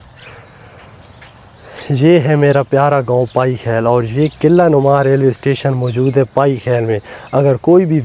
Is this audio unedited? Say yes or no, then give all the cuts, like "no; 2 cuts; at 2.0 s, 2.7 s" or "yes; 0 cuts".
yes; 0 cuts